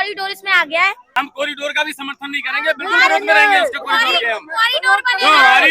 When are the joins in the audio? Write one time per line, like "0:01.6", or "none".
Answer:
0:01.0